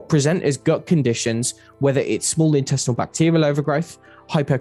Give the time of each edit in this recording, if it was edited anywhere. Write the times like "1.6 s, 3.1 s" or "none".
none